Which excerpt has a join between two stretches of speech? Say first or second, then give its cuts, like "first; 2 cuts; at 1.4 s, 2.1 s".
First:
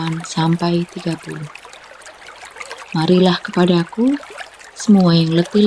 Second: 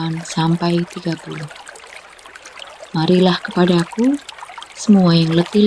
second; 2 cuts; at 1.5 s, 2.9 s